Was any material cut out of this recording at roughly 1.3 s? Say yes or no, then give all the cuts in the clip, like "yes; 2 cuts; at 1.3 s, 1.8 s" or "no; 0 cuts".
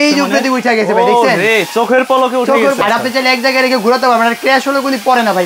no; 1 cut; at 2.8 s